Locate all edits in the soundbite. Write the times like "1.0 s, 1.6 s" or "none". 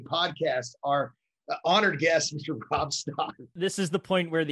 3.3 s